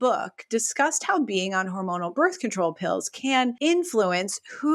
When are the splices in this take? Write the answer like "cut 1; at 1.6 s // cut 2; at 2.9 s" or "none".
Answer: cut 1; at 3.6 s